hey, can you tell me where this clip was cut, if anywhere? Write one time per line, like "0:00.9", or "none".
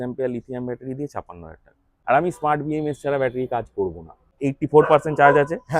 0:01.9
0:04.3